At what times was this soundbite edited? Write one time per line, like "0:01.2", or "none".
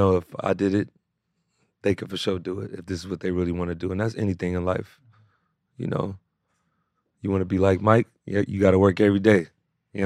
none